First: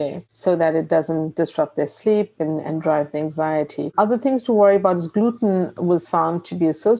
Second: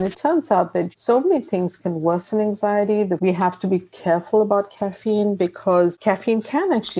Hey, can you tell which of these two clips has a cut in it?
second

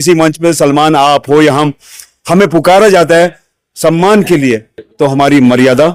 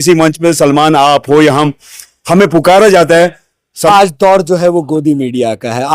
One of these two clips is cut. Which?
second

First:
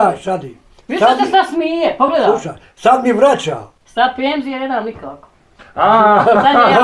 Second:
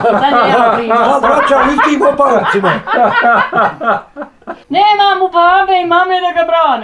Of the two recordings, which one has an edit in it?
second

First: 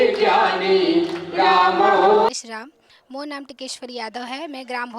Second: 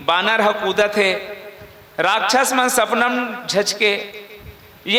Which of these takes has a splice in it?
first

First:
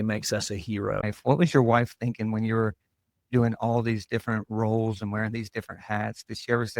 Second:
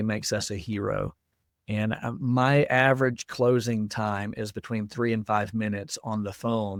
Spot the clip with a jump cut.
first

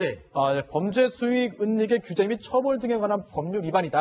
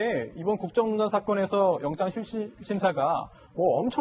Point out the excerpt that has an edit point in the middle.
second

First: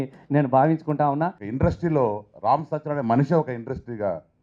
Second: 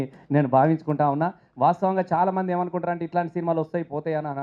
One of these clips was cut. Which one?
first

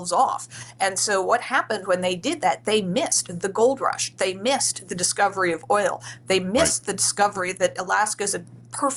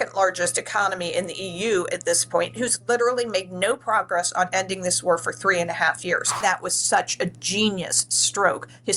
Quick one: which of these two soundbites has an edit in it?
second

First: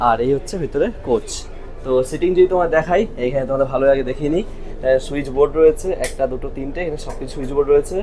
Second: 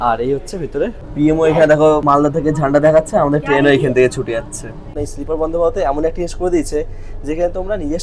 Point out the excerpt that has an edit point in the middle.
second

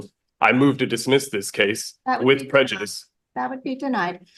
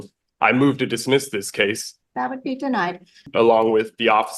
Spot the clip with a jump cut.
second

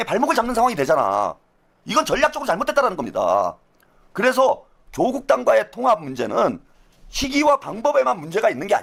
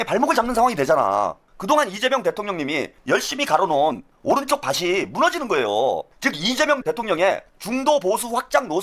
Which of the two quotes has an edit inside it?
second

